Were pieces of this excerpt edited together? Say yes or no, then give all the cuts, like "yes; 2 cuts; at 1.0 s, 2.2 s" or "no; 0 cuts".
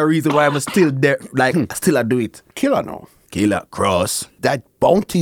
yes; 2 cuts; at 2.6 s, 4.2 s